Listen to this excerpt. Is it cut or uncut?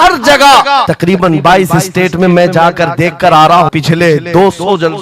cut